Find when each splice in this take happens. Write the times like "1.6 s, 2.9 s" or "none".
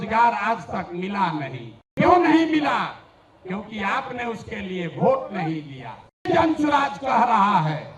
1.9 s, 6.3 s